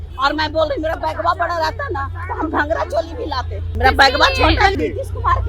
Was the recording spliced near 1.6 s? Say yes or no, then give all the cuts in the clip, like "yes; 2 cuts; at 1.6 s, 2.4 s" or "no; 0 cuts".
no; 2 cuts; at 3.7 s, 4.7 s